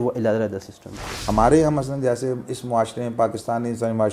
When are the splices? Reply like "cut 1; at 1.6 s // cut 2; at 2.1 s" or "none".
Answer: cut 1; at 1.1 s